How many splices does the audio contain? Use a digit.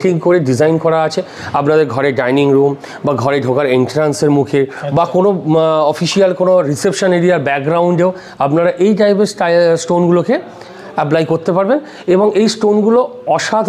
0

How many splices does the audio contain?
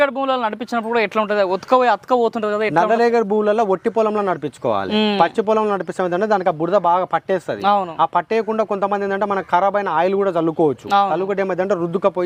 0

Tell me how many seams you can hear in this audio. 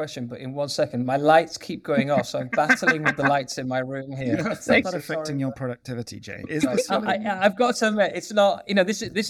0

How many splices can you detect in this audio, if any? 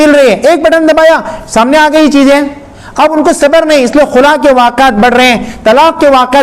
0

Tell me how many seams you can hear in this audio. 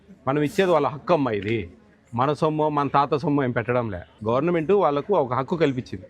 1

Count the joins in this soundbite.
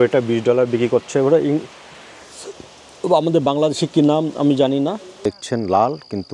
1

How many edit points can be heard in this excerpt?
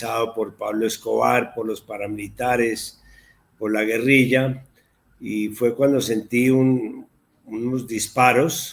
0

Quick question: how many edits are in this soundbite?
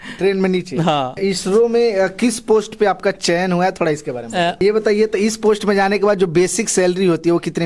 2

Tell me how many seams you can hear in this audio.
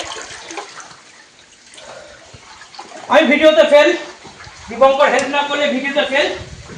0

